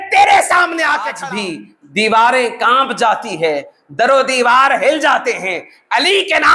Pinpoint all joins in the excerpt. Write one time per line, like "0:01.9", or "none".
0:01.2